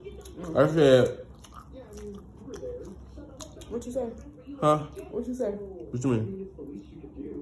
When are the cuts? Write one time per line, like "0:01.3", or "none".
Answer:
0:04.3

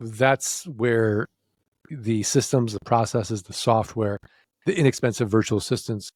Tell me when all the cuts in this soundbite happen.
none

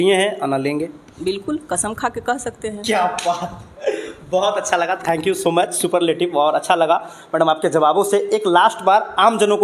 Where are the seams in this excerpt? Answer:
none

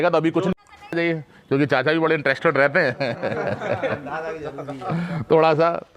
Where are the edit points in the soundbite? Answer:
0:00.9

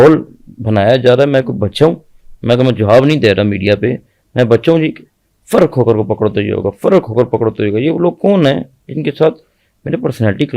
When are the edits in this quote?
none

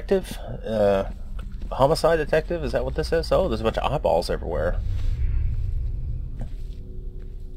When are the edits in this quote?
none

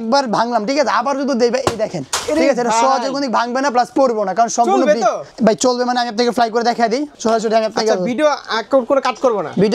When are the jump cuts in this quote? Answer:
0:05.3
0:07.1

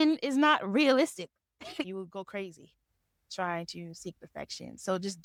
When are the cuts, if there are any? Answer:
none

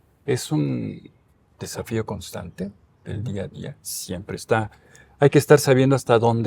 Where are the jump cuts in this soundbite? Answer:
none

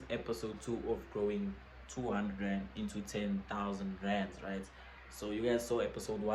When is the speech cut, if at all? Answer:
none

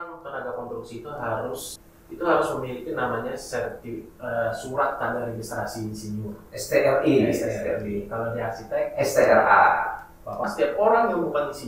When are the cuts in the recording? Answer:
0:01.8
0:10.4

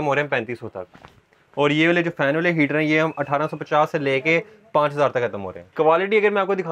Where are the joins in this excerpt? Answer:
0:05.7

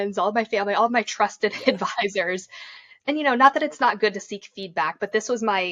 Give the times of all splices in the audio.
0:02.9

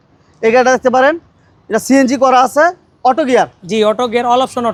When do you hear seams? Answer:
none

